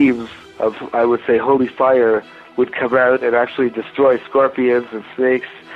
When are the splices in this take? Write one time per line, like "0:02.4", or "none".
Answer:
0:02.4